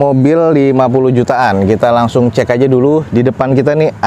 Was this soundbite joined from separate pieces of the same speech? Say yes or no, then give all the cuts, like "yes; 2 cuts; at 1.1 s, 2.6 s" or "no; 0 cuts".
no; 0 cuts